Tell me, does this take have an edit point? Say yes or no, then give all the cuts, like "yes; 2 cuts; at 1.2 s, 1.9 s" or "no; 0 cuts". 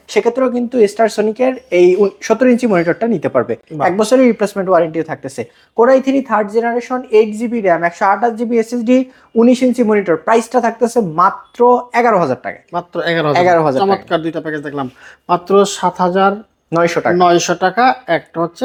no; 0 cuts